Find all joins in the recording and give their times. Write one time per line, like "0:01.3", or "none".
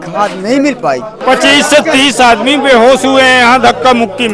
0:01.1